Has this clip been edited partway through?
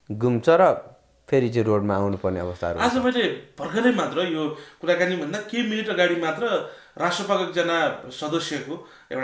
no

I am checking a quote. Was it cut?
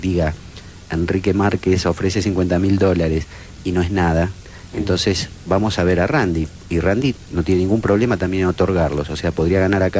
yes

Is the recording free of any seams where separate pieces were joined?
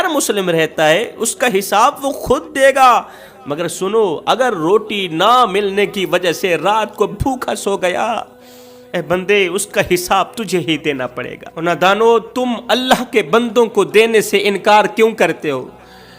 yes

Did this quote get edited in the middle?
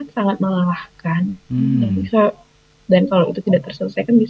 no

